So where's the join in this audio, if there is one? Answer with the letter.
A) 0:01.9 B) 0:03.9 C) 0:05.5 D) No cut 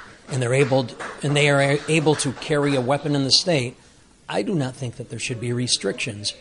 D